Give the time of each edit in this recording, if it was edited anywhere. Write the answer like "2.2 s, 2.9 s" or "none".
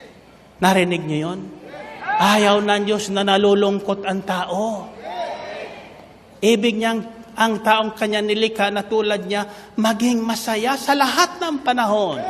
none